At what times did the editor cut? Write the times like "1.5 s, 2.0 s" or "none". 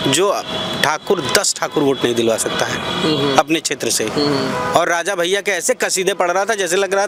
none